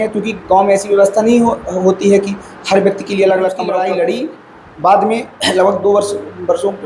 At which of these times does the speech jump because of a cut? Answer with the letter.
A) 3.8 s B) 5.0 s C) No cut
A